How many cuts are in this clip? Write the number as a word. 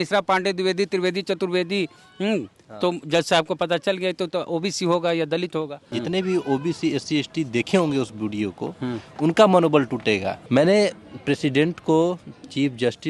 two